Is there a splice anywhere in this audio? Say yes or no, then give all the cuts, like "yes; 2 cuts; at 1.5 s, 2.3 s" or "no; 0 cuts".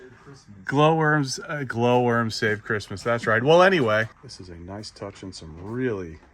yes; 1 cut; at 4.1 s